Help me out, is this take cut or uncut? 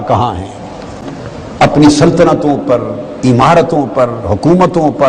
uncut